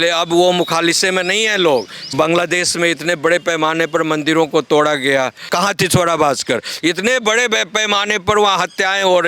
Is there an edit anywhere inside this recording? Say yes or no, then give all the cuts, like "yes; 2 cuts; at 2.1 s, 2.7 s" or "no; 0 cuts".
yes; 2 cuts; at 2.1 s, 5.5 s